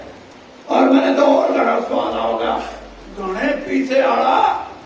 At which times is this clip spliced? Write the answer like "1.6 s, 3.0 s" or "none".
none